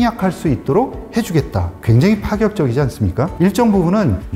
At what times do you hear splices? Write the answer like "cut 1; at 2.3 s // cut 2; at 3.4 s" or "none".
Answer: cut 1; at 1.7 s // cut 2; at 3.3 s